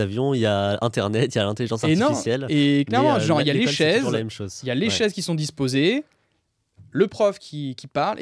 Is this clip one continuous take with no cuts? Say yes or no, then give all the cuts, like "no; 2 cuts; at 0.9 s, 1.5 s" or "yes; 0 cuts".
yes; 0 cuts